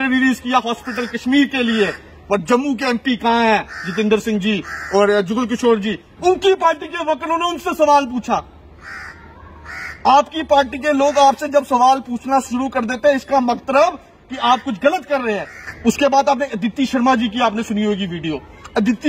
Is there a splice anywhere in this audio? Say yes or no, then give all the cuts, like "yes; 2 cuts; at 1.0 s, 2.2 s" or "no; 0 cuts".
yes; 1 cut; at 6.1 s